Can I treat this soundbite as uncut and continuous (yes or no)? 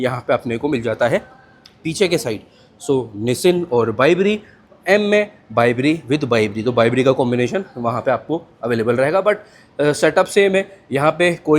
yes